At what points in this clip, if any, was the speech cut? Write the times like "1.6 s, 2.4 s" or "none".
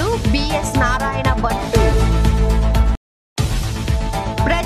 none